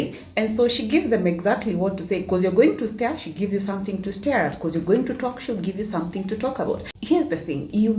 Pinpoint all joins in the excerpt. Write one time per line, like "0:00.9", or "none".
none